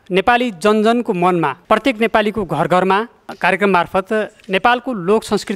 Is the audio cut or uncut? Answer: cut